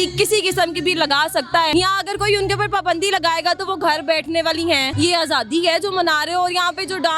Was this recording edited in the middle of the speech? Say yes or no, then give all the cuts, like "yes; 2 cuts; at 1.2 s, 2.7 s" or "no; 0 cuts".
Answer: yes; 2 cuts; at 1.7 s, 4.9 s